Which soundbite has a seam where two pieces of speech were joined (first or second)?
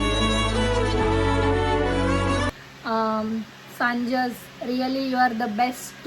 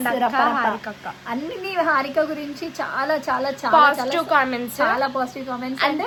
first